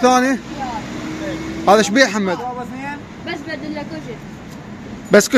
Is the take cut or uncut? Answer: uncut